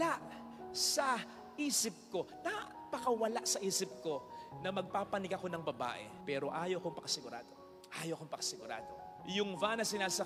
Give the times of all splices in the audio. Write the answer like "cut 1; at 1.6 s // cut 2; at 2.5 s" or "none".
none